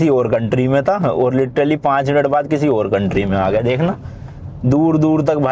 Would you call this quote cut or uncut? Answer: uncut